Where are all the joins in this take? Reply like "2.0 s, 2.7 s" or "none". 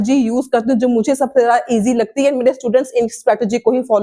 none